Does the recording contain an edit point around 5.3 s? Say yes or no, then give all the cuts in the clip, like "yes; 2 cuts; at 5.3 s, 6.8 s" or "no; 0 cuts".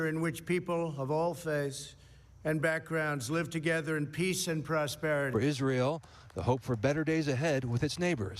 yes; 1 cut; at 5.3 s